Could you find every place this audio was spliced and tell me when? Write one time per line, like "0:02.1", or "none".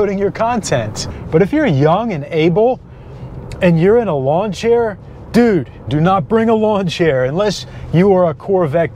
0:01.0
0:05.9